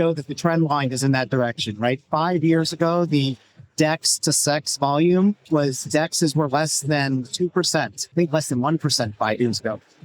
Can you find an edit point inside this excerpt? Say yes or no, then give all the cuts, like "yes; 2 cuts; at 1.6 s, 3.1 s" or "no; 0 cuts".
yes; 2 cuts; at 5.4 s, 8.0 s